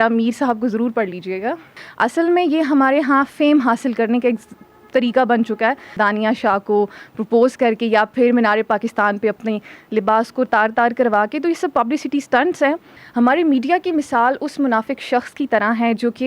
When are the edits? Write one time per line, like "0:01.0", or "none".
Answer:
0:01.8
0:06.0
0:12.9